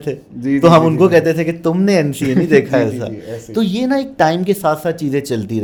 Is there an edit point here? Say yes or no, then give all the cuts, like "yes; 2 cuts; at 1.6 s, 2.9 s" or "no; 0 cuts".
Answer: no; 0 cuts